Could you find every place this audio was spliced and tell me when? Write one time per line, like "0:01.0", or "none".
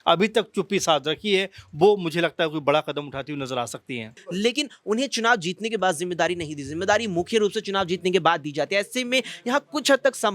0:04.1